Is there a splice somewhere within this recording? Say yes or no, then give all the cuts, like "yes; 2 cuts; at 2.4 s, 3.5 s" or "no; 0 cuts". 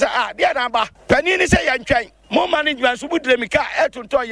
yes; 2 cuts; at 0.9 s, 2.2 s